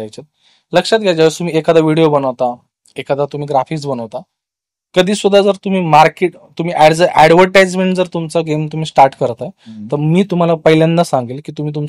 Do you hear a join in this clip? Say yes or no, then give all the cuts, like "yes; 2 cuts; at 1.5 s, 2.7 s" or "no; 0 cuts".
no; 0 cuts